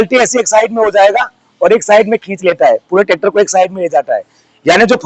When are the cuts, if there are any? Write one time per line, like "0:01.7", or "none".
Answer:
none